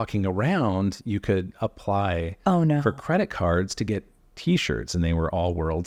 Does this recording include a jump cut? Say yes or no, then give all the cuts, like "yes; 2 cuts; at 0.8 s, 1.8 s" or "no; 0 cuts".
no; 0 cuts